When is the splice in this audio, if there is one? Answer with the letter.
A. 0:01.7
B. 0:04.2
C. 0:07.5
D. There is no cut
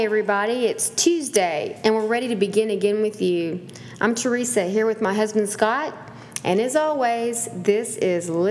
A